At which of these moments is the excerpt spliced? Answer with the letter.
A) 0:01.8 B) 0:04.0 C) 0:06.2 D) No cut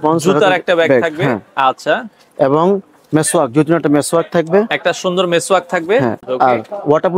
C